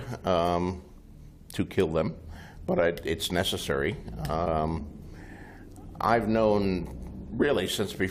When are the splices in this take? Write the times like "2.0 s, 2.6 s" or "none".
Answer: none